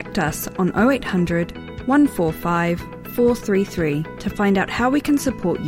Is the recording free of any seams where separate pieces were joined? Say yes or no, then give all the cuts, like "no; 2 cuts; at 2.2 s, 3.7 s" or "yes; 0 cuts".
yes; 0 cuts